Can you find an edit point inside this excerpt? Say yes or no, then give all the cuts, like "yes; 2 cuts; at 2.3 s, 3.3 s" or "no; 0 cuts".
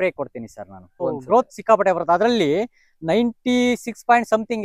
yes; 1 cut; at 1.0 s